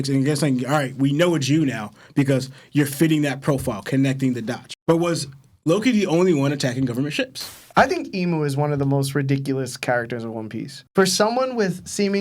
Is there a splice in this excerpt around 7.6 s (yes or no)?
yes